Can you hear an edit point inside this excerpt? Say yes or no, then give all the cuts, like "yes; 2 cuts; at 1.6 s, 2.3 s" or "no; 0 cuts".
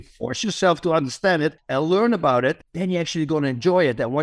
yes; 2 cuts; at 1.6 s, 2.7 s